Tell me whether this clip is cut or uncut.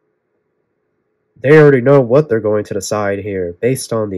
uncut